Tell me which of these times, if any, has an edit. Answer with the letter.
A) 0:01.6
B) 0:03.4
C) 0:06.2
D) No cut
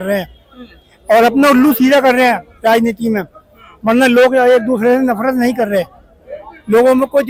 D